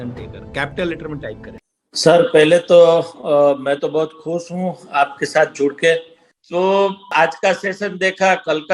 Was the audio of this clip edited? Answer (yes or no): no